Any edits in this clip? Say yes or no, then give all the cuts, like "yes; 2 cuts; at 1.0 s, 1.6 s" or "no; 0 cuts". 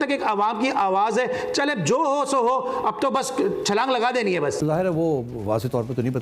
yes; 1 cut; at 4.6 s